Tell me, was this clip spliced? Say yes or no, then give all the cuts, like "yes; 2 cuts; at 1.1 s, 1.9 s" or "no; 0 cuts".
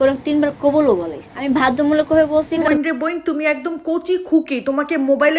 yes; 2 cuts; at 1.4 s, 2.6 s